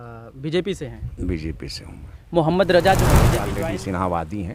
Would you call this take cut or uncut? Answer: cut